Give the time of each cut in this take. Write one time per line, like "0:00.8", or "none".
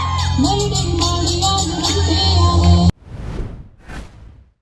none